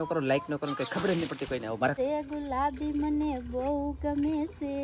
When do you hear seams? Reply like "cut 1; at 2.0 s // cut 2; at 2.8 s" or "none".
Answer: cut 1; at 1.9 s

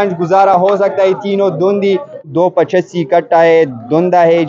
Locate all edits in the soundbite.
cut 1; at 2.3 s

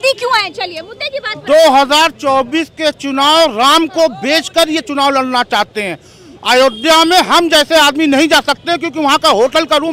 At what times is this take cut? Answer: none

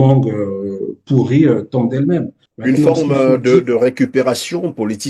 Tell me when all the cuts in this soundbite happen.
cut 1; at 2.4 s

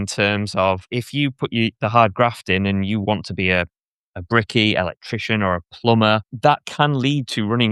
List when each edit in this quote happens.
cut 1; at 1.0 s // cut 2; at 6.3 s

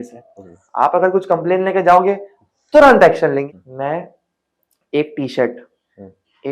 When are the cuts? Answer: cut 1; at 3.5 s

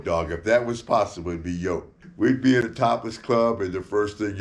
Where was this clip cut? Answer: cut 1; at 2.0 s

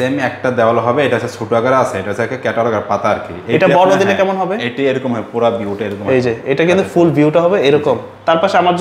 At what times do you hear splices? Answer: none

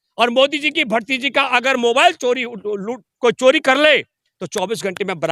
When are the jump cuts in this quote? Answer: none

